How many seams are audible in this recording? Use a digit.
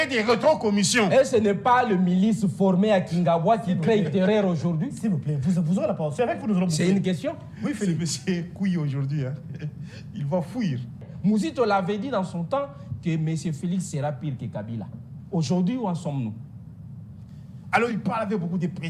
2